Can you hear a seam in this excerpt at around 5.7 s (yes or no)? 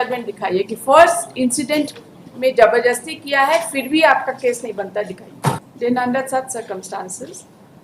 yes